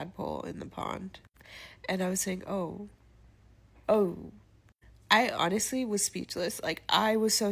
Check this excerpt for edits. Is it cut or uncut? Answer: cut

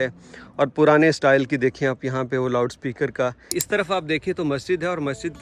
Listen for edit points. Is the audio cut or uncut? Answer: cut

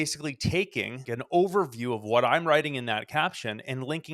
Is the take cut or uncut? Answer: cut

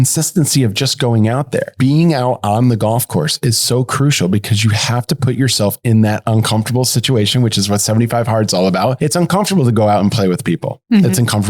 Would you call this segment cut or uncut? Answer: cut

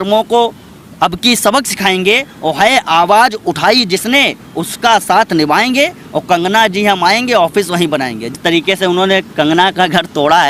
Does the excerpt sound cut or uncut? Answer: cut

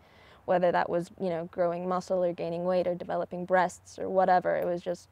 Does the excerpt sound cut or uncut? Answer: cut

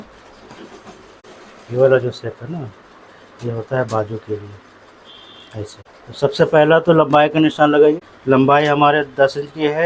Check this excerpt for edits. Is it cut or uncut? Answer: cut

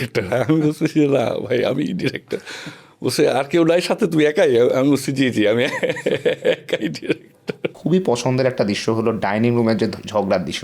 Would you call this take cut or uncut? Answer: cut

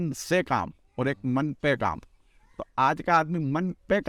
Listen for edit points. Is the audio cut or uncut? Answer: uncut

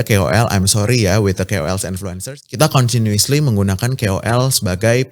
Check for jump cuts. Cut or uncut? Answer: cut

